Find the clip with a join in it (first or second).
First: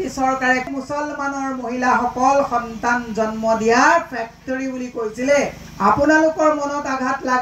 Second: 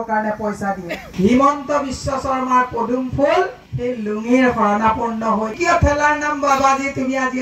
second